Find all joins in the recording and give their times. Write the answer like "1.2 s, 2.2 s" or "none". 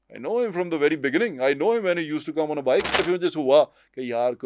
3.0 s